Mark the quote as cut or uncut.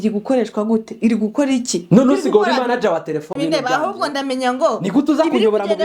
cut